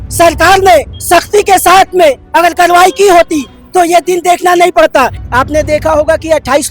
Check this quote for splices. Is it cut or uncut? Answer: cut